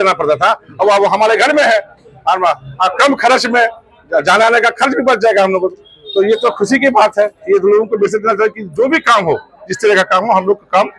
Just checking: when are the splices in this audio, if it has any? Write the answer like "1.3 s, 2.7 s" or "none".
none

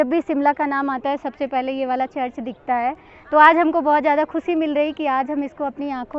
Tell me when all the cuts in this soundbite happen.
none

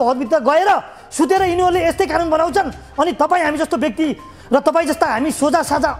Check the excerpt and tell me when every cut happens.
none

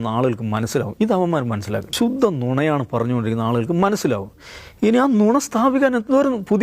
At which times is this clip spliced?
1.9 s

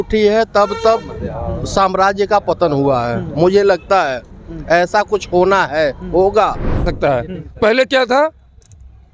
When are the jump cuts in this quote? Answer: 6.8 s

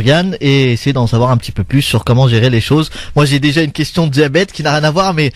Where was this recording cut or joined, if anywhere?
3.0 s

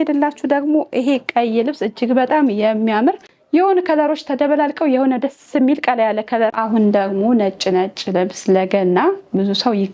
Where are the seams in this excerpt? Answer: 3.3 s, 6.6 s

